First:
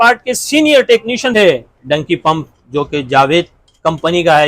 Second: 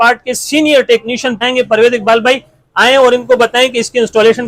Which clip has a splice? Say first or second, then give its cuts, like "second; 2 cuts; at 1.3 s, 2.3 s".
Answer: first; 1 cut; at 1.3 s